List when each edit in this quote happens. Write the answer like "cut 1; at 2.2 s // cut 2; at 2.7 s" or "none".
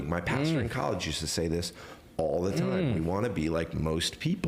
none